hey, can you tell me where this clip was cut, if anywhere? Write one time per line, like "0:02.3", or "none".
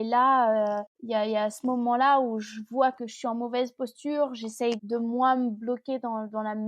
0:00.9